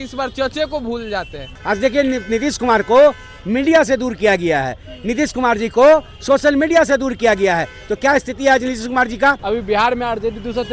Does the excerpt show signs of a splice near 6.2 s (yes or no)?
no